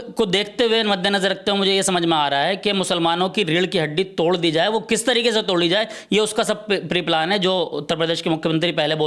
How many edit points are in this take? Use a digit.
0